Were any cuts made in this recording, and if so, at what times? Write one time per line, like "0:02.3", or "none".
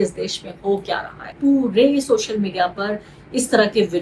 0:01.3